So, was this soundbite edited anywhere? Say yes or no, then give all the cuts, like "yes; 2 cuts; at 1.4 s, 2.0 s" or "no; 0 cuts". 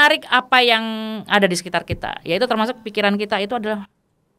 no; 0 cuts